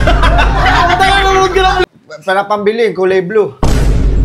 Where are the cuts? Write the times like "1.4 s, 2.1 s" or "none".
1.9 s

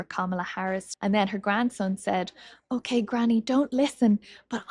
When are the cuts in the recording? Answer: 0.9 s

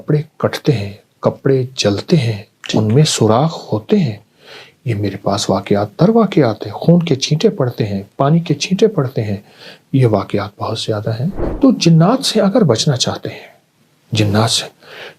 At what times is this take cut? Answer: 11.4 s

